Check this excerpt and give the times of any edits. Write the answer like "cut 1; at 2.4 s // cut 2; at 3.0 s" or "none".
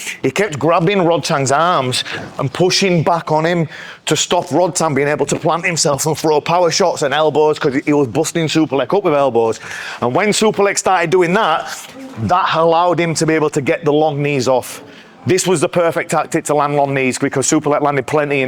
none